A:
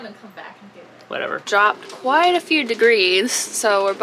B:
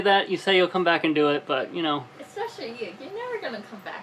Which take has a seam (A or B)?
A